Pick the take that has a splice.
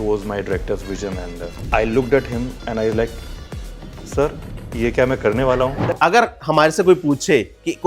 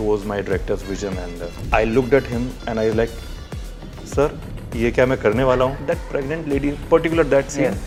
first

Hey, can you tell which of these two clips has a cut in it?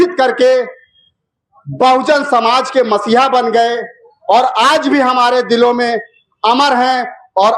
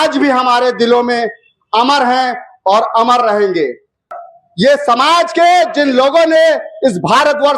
second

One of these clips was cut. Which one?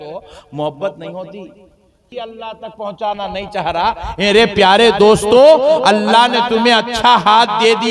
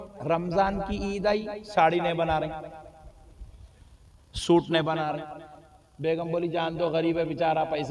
first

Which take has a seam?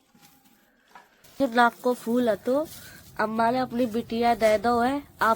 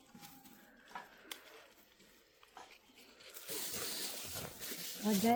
first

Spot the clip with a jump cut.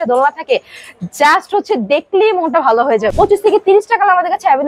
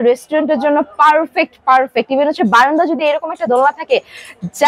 first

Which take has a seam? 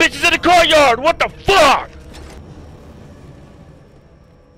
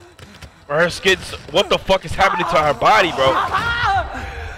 first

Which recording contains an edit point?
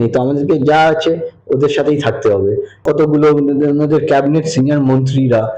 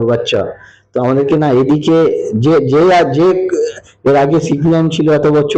first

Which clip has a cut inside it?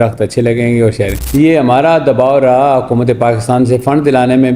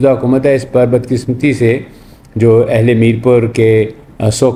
first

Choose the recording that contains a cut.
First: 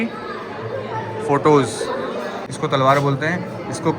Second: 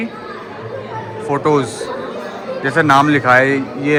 first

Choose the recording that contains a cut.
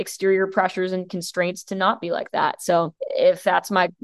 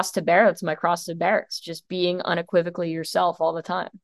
first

